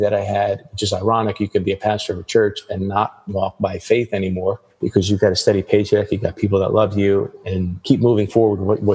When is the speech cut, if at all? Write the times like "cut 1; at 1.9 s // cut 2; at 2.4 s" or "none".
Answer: cut 1; at 4.7 s // cut 2; at 7.8 s

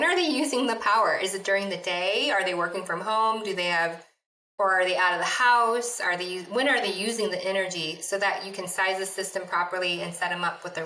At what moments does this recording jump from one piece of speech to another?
none

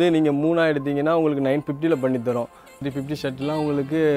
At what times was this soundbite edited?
cut 1; at 2.8 s

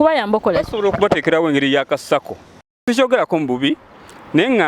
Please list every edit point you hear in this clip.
cut 1; at 2.8 s

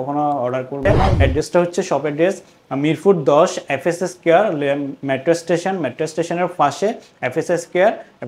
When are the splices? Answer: cut 1; at 1.0 s

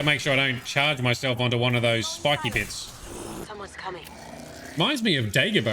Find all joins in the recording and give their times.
cut 1; at 3.4 s

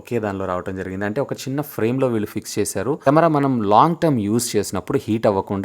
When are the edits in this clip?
cut 1; at 3.0 s

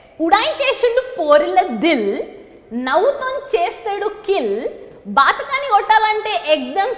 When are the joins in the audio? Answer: none

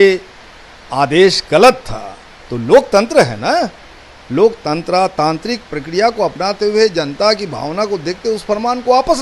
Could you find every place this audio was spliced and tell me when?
none

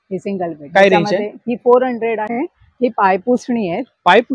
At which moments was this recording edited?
cut 1; at 2.3 s

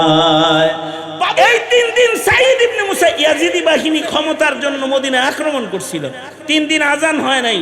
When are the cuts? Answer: cut 1; at 1.3 s

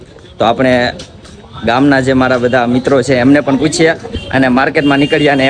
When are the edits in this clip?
none

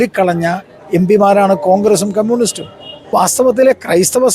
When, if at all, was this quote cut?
cut 1; at 3.1 s

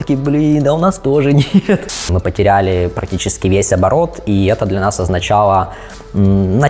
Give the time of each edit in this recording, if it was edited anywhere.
cut 1; at 1.9 s

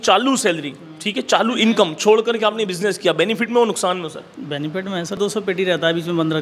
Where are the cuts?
cut 1; at 5.2 s

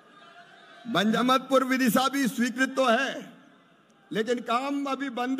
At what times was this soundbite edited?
cut 1; at 1.0 s

